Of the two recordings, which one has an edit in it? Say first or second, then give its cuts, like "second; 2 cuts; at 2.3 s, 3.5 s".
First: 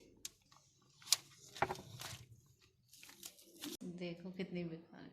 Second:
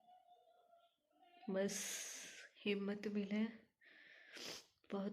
first; 1 cut; at 3.8 s